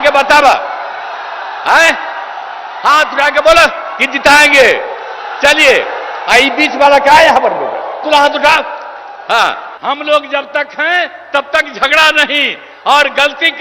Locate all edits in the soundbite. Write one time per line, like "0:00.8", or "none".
0:09.7